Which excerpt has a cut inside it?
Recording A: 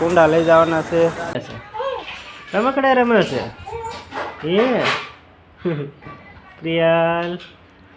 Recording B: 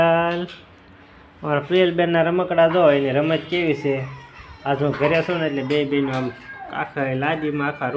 A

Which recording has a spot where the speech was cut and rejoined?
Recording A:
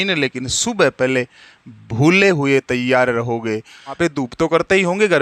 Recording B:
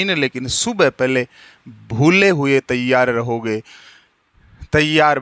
A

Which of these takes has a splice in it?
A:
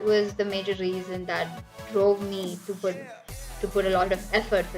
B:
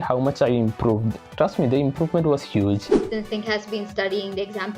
B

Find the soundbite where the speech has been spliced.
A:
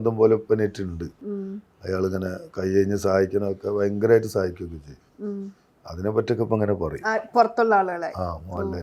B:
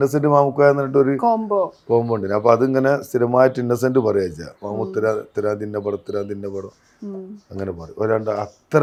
A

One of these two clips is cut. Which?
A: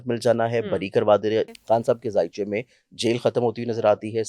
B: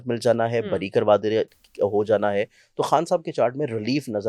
A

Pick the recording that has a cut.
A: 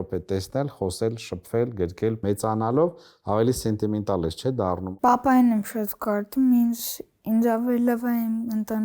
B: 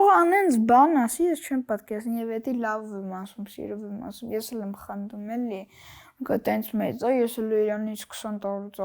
A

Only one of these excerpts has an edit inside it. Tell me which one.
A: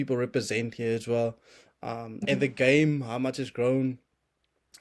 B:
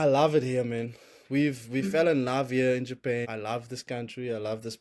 B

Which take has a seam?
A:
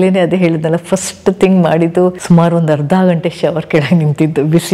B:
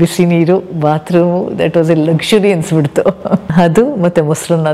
B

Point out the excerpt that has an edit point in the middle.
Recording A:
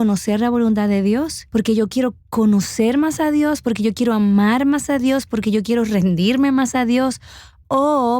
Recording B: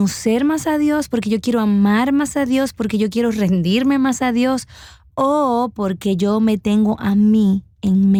A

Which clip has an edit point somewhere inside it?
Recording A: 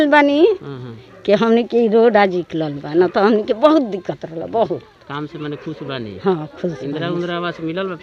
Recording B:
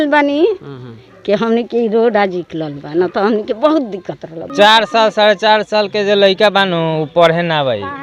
B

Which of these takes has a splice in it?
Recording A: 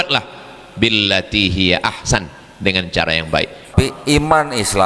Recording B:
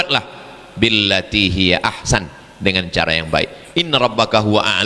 A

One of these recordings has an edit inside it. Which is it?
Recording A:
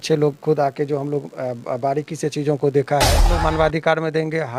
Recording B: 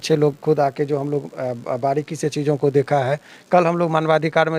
A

